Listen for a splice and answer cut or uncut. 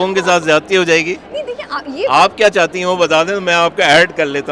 uncut